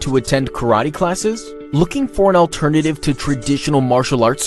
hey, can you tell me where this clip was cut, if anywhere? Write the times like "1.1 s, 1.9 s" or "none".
1.5 s